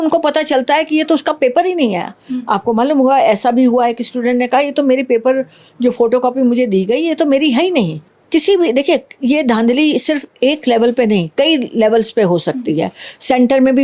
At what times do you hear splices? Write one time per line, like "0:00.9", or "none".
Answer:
0:08.1